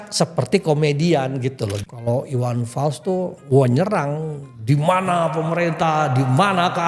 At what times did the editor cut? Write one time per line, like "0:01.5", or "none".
0:01.7
0:03.4